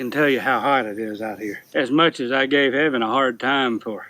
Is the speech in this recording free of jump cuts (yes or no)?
no